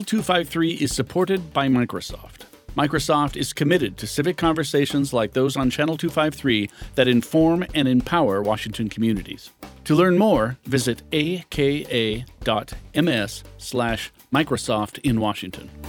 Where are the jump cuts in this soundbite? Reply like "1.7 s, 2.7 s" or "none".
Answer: none